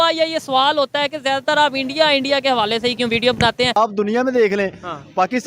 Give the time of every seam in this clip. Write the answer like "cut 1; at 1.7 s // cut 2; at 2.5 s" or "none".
cut 1; at 3.8 s